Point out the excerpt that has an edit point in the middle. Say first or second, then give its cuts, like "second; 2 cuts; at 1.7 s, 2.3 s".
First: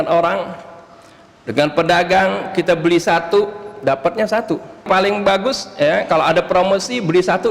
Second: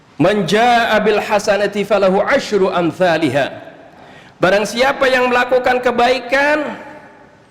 first; 1 cut; at 4.8 s